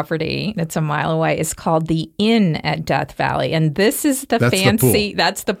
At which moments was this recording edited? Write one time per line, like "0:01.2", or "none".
none